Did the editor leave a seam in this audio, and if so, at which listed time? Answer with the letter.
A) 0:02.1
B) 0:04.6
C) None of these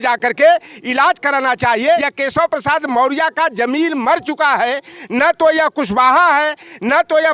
A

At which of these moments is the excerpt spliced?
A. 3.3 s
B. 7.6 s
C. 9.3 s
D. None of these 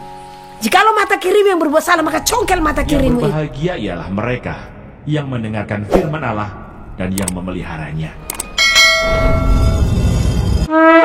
A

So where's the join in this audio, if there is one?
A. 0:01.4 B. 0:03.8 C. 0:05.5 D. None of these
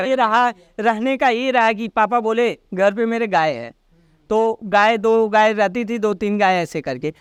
D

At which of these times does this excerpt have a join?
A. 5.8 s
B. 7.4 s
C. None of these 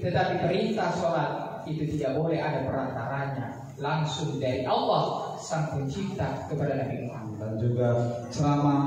B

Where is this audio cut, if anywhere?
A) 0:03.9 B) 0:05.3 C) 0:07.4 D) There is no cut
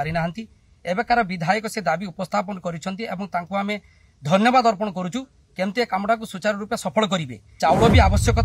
C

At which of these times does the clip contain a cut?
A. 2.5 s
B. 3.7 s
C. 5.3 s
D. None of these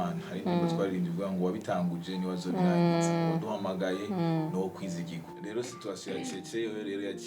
C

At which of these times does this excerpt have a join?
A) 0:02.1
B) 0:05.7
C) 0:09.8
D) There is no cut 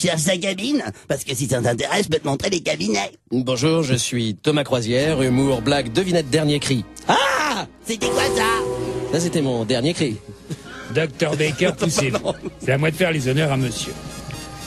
D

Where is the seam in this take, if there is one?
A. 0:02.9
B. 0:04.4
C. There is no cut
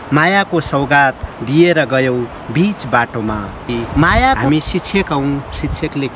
B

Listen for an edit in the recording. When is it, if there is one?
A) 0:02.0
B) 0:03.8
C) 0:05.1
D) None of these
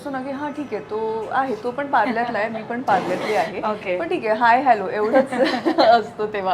D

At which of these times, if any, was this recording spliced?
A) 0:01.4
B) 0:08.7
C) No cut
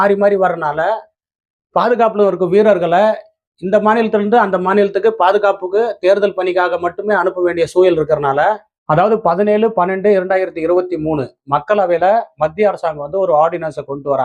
B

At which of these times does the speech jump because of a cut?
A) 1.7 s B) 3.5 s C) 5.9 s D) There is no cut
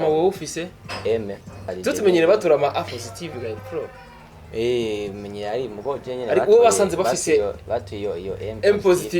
A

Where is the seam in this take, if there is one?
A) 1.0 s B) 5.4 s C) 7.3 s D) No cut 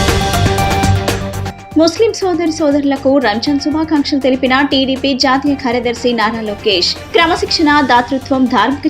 A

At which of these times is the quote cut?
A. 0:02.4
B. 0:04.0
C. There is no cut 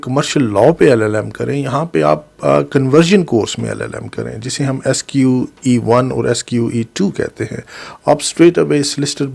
C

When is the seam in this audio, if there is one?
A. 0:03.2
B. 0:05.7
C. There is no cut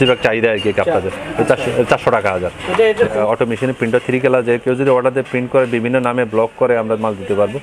A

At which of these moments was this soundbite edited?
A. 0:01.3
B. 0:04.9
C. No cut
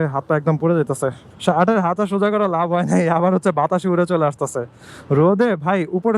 A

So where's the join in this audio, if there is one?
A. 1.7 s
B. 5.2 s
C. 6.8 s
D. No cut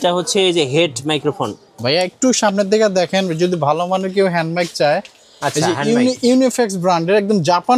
A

